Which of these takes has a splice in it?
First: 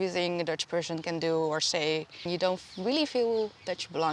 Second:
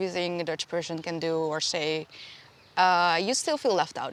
first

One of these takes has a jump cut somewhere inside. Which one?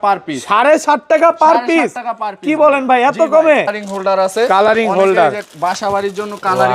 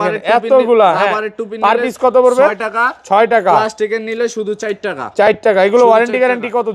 first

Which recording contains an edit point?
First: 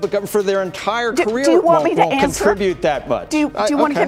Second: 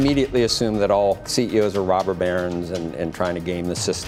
second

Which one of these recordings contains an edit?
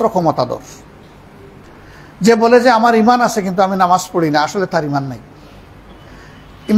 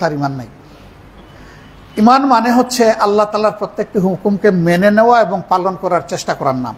first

